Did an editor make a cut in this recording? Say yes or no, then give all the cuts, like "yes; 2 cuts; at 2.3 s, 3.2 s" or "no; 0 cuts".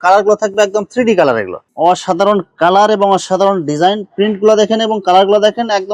yes; 1 cut; at 1.6 s